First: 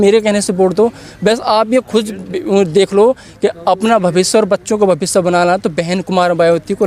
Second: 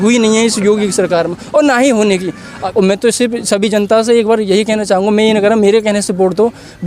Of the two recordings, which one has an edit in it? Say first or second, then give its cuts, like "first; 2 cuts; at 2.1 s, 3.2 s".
second; 1 cut; at 2.6 s